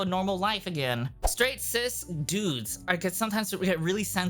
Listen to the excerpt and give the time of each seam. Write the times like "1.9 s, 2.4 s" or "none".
1.2 s